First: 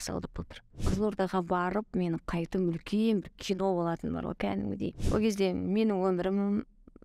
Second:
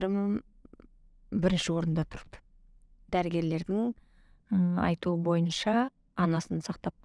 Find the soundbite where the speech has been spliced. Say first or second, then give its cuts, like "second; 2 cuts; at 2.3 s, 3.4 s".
first; 2 cuts; at 0.9 s, 5.0 s